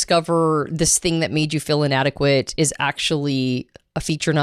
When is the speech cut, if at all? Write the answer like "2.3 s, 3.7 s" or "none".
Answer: none

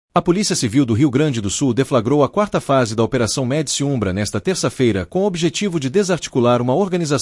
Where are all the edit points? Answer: none

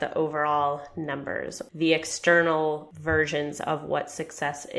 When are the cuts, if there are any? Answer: 1.5 s, 2.9 s

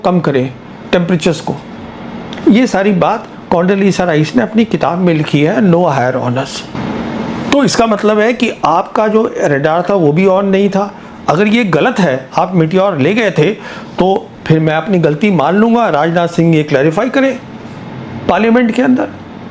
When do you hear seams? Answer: 6.7 s

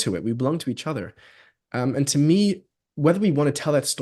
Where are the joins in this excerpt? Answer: none

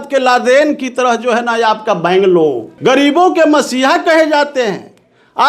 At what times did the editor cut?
2.7 s

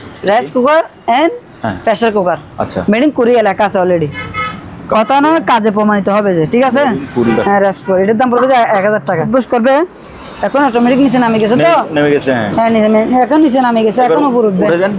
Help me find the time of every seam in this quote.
7.3 s, 9.3 s

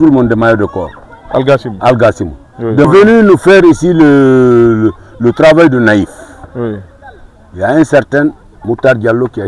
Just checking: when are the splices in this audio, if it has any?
2.8 s

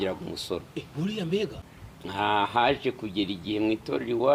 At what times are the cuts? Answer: 1.6 s

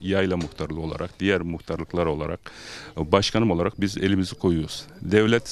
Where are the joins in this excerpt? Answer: none

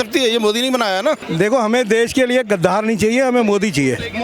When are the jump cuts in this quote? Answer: 1.3 s

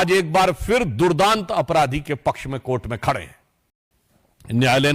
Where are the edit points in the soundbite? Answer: 3.6 s

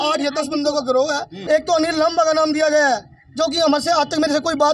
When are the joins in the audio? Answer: 1.3 s

